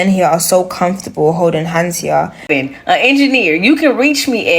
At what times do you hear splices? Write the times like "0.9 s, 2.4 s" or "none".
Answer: 2.5 s